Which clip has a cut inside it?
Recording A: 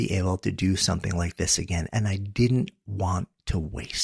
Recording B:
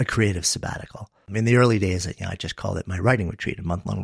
B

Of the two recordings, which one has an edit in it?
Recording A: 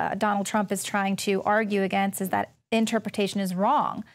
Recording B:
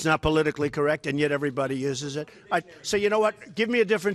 A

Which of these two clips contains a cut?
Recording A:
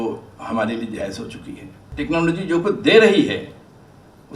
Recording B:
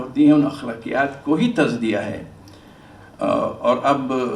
A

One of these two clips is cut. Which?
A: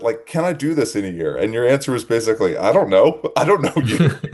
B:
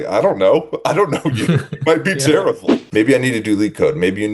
B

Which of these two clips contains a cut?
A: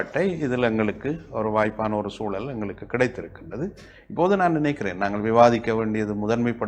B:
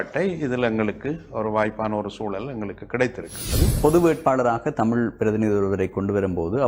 B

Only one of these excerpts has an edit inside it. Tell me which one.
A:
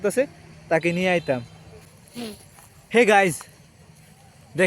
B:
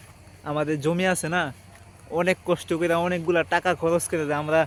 A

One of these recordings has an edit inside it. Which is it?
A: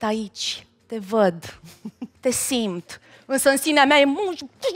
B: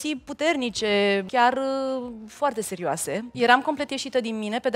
B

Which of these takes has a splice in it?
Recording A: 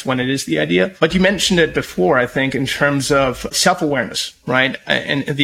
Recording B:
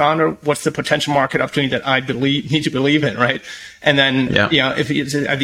A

